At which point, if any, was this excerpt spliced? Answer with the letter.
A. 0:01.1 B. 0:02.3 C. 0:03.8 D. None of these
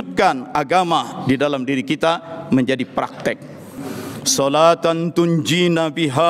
C